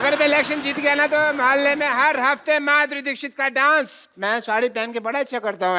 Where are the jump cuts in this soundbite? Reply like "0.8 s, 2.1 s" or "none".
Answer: 4.1 s